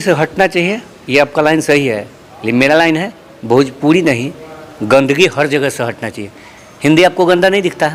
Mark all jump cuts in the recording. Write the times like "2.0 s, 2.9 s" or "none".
none